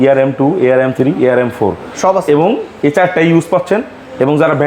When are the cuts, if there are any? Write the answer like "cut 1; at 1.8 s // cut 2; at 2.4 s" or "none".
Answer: none